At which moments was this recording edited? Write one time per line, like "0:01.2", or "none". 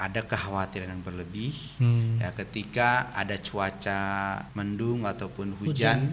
0:04.5